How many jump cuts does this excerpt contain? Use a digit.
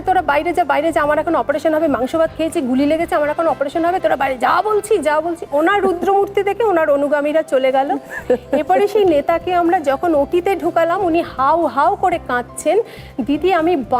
0